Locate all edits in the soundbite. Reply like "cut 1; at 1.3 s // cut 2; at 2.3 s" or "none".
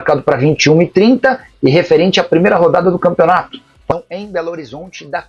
cut 1; at 3.9 s